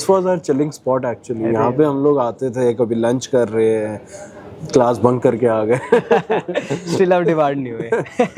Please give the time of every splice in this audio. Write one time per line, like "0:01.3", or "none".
none